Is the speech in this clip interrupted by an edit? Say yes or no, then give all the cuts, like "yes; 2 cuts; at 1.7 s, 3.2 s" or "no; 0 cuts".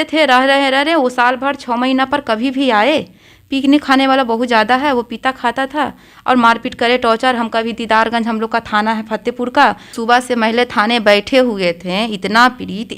yes; 1 cut; at 9.9 s